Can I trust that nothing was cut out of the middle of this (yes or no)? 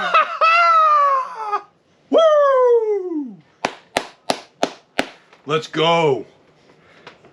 yes